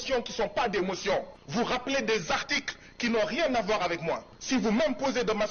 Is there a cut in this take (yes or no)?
yes